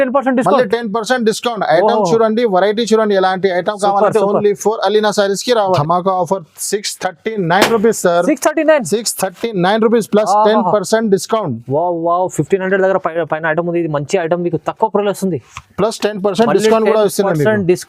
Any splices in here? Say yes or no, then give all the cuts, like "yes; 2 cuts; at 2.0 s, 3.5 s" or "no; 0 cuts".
yes; 1 cut; at 5.8 s